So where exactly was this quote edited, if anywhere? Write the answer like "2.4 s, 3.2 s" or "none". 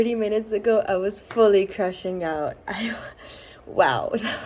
none

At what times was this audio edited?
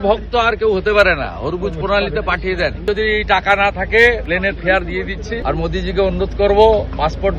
2.8 s, 4.2 s, 5.4 s

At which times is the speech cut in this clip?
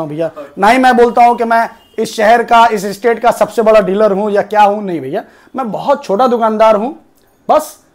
none

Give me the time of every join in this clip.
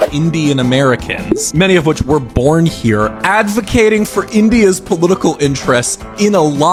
none

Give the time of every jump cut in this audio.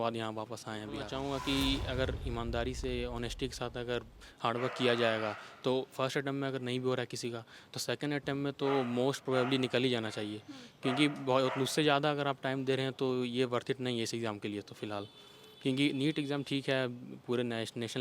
1.1 s

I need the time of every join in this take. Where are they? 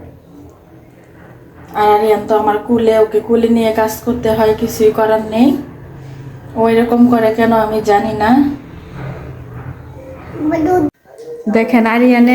10.9 s

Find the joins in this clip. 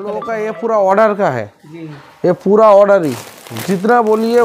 none

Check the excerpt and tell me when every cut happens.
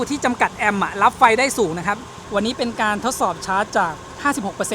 2.2 s

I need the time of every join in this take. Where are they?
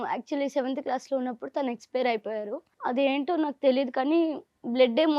2.7 s

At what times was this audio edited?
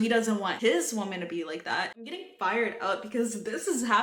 2.1 s

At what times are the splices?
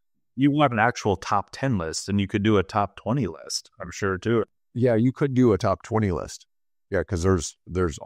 none

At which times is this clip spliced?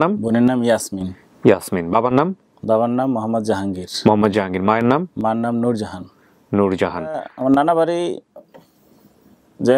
7.3 s

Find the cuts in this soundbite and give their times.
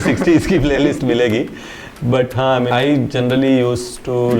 2.7 s

